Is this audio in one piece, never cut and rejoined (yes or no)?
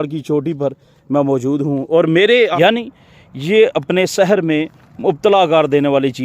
no